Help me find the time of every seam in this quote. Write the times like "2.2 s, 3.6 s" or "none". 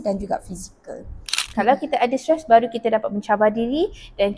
1.4 s